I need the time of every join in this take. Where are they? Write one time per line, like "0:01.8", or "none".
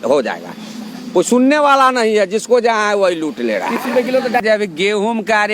0:04.4